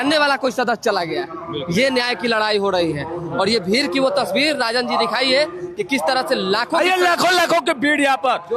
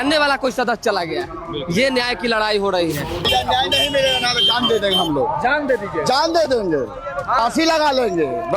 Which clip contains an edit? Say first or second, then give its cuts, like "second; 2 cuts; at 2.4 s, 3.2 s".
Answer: second; 1 cut; at 3.1 s